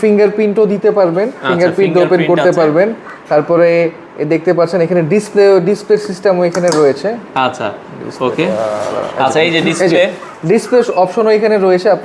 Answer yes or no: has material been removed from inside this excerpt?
no